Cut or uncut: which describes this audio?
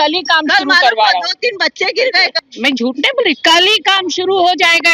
cut